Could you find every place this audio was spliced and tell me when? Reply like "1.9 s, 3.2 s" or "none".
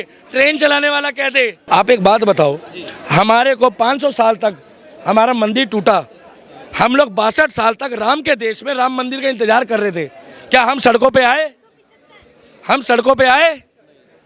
1.6 s